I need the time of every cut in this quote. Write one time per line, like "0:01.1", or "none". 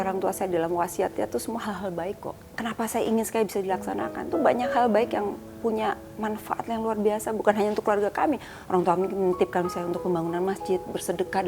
0:02.4